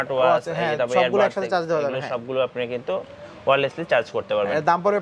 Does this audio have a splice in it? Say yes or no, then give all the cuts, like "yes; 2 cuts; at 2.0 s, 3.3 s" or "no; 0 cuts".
no; 0 cuts